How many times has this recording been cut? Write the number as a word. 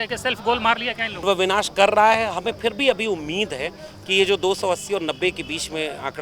one